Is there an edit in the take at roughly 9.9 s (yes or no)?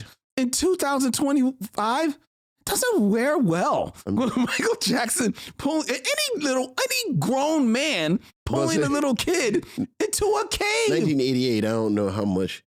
no